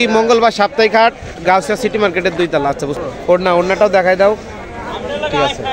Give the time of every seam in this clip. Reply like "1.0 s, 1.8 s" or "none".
2.9 s